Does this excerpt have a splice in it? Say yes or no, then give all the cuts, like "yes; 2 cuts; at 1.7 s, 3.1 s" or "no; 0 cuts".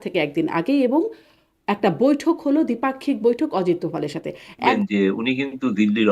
yes; 1 cut; at 4.7 s